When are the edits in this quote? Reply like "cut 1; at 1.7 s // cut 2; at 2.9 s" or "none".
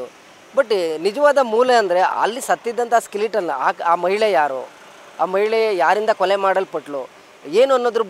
none

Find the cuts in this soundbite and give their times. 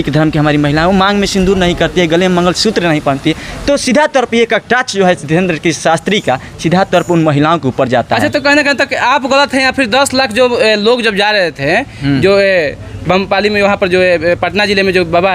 none

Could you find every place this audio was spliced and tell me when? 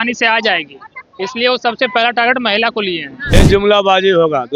cut 1; at 3.2 s

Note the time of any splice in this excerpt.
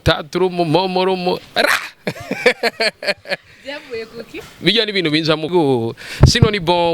cut 1; at 5.5 s

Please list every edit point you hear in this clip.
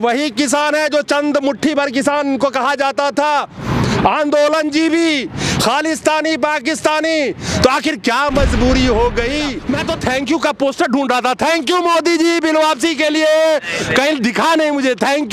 cut 1; at 9.6 s

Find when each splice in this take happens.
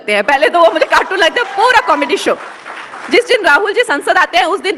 none

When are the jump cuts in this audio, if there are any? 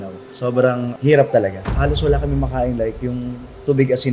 cut 1; at 1.7 s

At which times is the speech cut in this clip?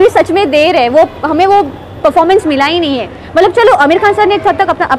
none

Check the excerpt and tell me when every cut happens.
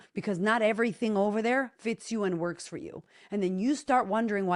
none

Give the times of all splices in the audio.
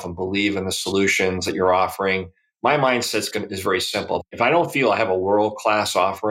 cut 1; at 4.2 s

